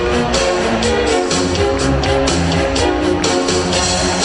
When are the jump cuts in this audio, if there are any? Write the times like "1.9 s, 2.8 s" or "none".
none